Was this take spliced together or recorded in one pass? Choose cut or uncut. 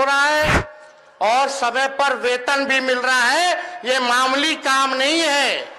uncut